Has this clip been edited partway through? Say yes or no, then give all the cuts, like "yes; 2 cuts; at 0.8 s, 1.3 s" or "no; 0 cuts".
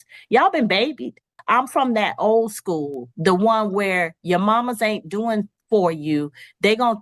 yes; 1 cut; at 1.3 s